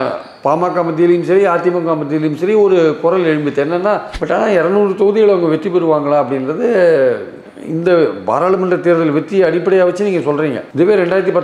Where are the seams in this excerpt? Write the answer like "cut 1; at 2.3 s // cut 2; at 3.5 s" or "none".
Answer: cut 1; at 4.1 s

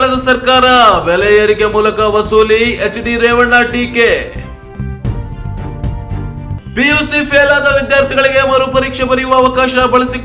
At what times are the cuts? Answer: none

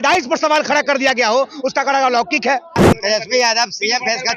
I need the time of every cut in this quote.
cut 1; at 2.9 s

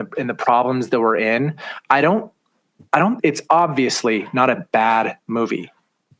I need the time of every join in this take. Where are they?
none

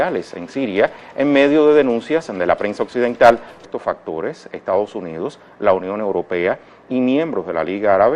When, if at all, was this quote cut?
none

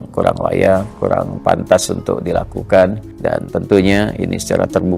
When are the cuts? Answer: cut 1; at 0.9 s // cut 2; at 3.1 s

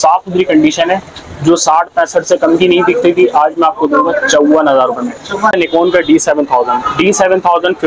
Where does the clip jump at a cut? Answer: cut 1; at 5.6 s

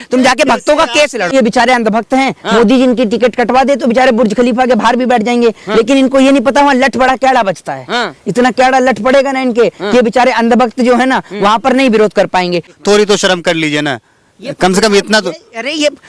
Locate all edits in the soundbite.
cut 1; at 1.3 s // cut 2; at 12.7 s

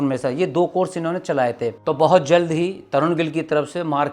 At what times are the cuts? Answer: cut 1; at 1.8 s

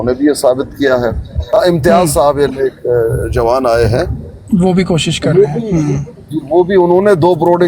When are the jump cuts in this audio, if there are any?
cut 1; at 1.3 s

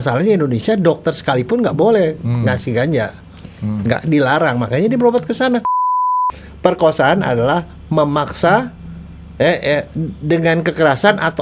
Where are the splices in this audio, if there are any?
cut 1; at 6.1 s

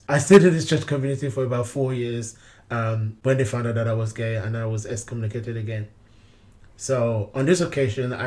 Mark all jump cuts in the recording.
none

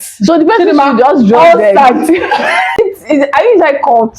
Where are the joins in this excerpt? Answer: cut 1; at 2.8 s

